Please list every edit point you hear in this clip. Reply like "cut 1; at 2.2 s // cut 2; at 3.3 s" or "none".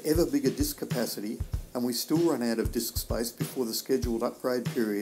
none